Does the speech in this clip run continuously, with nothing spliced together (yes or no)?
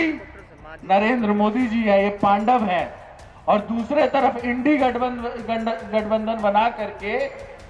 yes